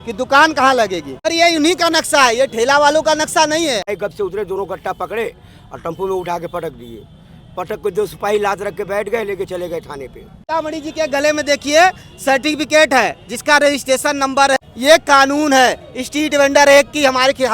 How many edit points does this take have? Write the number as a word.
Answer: four